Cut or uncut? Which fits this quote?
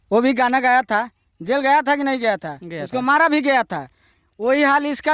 uncut